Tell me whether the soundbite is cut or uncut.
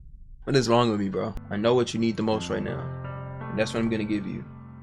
cut